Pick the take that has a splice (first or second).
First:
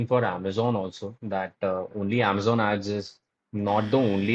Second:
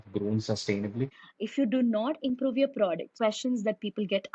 second